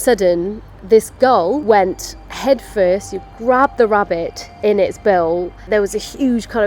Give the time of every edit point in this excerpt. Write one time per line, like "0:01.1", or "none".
0:01.6
0:05.5